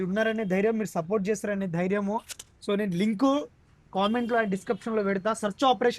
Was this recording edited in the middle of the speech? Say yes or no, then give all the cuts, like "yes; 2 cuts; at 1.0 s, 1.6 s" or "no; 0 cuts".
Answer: no; 0 cuts